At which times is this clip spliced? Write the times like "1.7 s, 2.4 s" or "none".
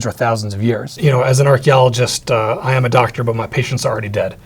0.9 s